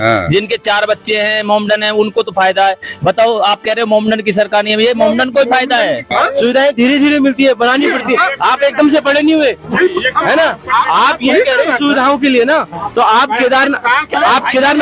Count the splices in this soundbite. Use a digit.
1